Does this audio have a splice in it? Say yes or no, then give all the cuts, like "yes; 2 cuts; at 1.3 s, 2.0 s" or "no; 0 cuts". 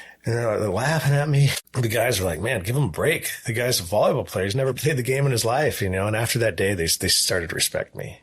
yes; 1 cut; at 1.6 s